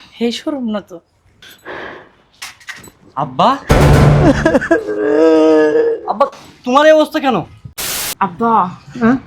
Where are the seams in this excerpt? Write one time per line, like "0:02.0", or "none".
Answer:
0:08.0

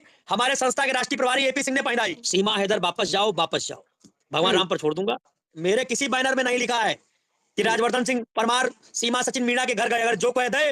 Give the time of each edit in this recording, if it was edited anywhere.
0:02.2
0:05.5

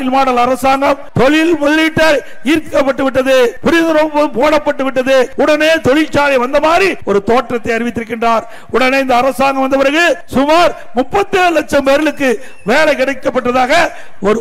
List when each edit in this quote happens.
0:01.1
0:03.6
0:05.3
0:07.0
0:10.2

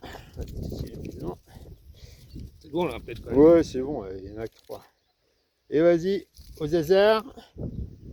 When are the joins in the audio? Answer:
none

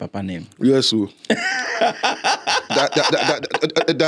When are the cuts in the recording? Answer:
none

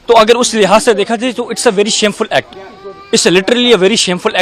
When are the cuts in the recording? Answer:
none

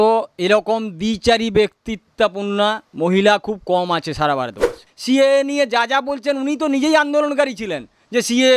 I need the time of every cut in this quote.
0:04.8

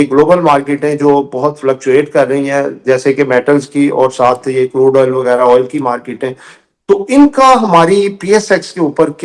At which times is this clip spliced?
none

